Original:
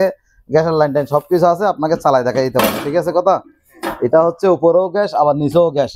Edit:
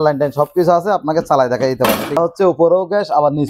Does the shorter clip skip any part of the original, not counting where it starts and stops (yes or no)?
yes